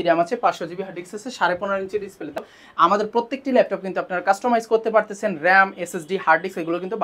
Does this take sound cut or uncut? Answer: cut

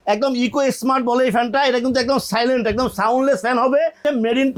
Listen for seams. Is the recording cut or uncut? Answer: uncut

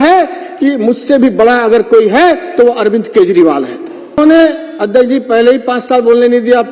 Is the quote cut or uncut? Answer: cut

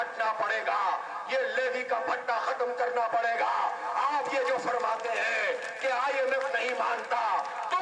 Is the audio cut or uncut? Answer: uncut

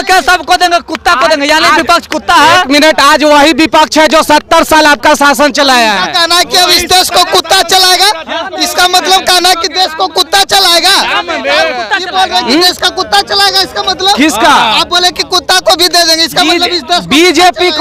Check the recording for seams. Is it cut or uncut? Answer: uncut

